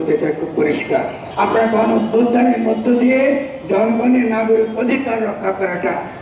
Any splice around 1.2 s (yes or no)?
yes